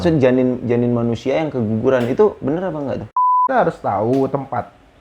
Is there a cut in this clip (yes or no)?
yes